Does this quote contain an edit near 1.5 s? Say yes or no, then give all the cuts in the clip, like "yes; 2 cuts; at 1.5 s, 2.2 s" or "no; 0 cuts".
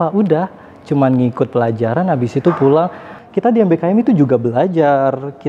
no; 1 cut; at 3.2 s